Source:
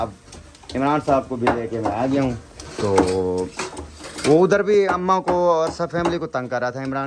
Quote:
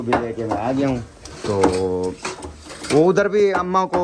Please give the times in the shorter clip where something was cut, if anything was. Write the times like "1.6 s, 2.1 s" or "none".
none